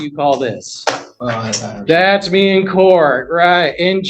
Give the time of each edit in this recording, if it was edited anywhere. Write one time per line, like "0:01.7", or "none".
none